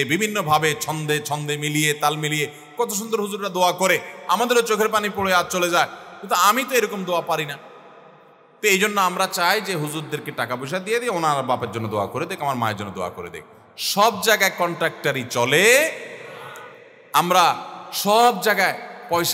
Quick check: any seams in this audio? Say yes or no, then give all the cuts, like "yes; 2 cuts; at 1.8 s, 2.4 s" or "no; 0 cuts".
no; 0 cuts